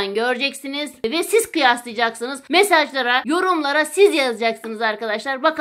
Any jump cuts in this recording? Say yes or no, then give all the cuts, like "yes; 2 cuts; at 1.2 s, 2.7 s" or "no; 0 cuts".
yes; 3 cuts; at 1.0 s, 2.3 s, 3.2 s